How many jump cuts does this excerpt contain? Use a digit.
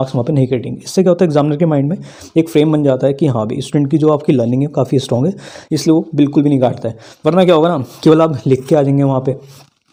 0